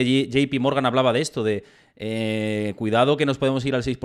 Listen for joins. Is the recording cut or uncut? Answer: uncut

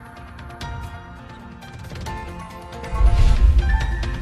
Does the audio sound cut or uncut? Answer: cut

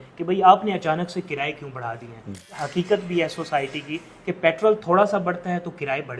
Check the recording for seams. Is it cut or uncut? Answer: cut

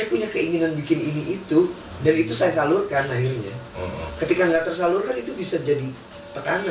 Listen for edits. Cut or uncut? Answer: uncut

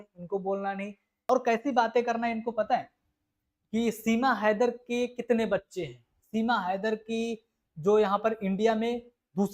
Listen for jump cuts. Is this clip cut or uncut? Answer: cut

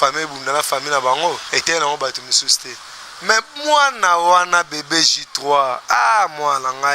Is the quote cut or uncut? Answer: cut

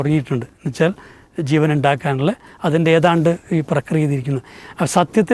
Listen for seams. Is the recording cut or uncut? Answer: uncut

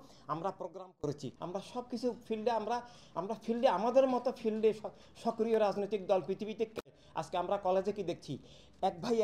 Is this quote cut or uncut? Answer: cut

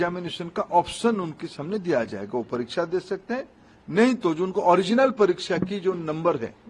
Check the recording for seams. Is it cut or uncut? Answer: uncut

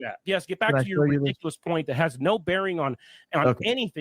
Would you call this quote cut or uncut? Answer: uncut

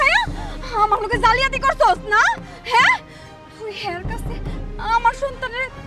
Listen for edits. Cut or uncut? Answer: uncut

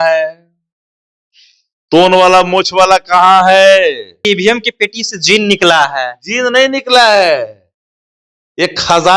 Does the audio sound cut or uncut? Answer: cut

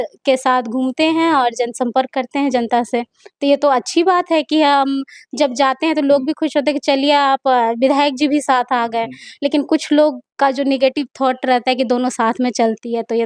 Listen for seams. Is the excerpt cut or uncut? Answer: uncut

